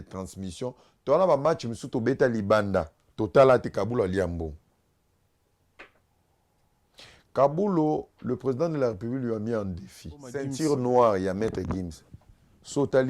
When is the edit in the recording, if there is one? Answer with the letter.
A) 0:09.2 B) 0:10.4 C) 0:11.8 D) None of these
B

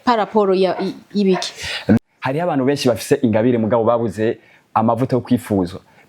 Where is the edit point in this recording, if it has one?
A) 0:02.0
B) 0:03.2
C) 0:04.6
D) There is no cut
A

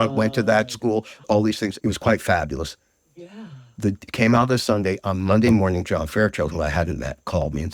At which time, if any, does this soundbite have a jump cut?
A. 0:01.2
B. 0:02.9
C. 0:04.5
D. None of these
A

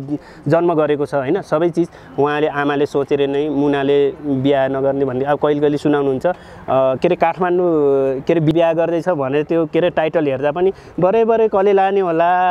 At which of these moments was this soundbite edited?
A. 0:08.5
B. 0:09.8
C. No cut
A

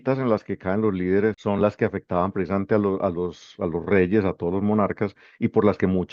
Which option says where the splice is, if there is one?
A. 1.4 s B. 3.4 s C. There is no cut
A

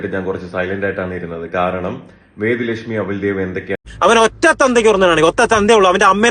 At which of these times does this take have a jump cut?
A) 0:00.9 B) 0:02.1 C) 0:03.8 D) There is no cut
C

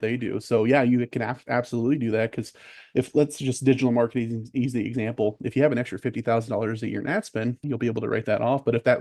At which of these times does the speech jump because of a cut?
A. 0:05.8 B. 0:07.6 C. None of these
B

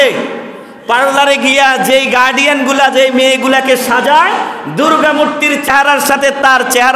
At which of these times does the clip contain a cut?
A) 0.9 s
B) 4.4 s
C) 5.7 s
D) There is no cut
C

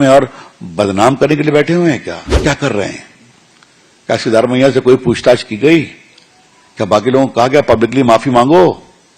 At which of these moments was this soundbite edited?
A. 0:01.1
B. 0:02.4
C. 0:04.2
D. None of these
B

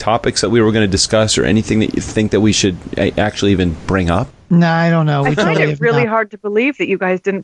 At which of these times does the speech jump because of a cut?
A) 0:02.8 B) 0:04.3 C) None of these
B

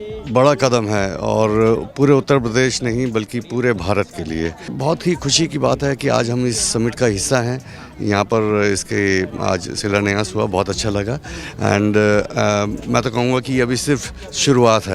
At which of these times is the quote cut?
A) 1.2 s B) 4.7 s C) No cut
B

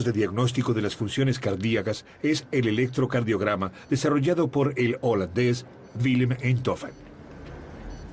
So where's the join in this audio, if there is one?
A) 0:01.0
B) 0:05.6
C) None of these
A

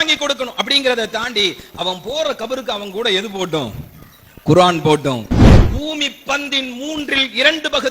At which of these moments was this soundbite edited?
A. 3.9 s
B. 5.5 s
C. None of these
B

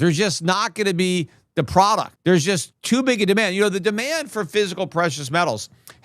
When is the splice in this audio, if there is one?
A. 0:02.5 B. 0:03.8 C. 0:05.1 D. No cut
A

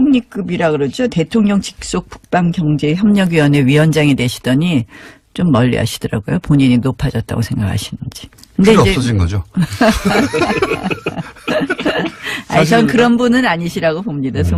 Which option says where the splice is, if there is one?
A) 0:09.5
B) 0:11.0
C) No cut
C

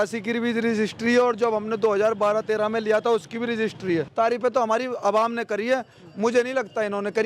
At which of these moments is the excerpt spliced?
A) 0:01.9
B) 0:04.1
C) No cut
B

